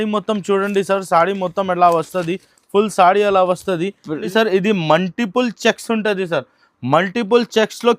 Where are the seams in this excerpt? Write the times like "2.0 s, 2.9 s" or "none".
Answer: 4.2 s